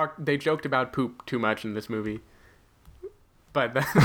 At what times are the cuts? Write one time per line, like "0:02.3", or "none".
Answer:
none